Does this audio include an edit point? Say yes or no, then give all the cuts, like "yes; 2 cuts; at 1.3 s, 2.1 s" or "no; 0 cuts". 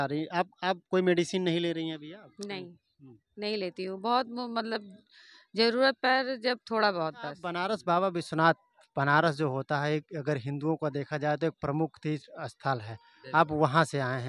yes; 1 cut; at 7.5 s